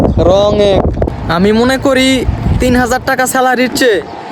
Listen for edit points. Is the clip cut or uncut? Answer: cut